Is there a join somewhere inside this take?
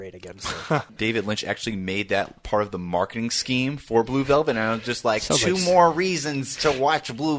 yes; 1 cut; at 0.9 s

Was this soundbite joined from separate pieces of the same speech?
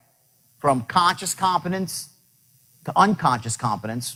no; 0 cuts

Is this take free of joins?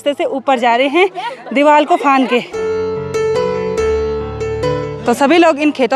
yes; 0 cuts

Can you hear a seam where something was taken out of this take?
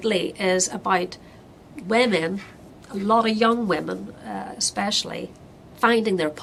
no; 0 cuts

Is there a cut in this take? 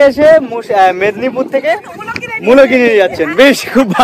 no; 0 cuts

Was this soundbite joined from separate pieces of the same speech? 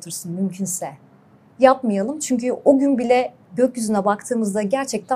no; 0 cuts

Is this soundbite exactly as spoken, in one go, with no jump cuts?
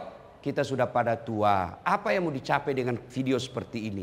yes; 0 cuts

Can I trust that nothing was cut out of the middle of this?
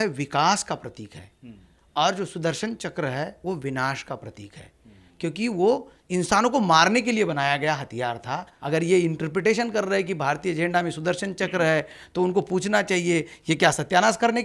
no; 1 cut; at 8.5 s

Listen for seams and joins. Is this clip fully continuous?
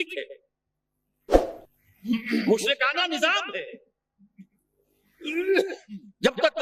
yes; 0 cuts

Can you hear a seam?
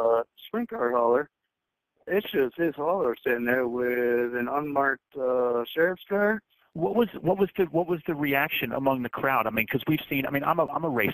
no; 0 cuts

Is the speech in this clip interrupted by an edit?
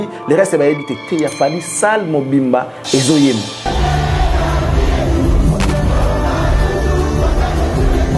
no; 0 cuts

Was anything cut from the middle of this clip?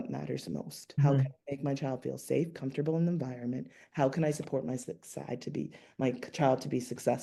no; 0 cuts

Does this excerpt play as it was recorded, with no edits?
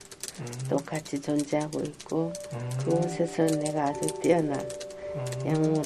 yes; 0 cuts

